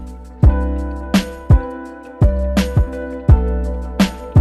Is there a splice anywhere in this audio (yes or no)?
no